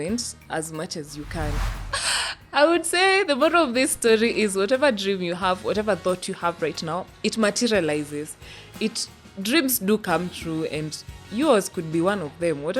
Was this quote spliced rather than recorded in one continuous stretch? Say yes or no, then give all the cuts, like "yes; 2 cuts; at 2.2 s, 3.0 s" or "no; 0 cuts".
yes; 1 cut; at 1.6 s